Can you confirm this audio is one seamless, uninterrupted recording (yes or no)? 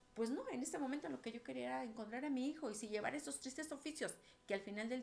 yes